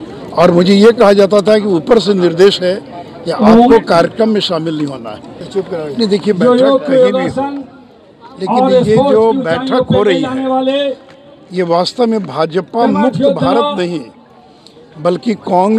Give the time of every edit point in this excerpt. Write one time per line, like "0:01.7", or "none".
0:05.5